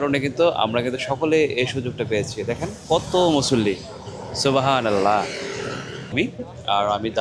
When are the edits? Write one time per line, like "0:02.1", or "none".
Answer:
0:06.1